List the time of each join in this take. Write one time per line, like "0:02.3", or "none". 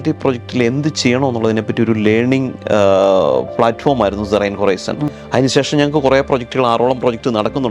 none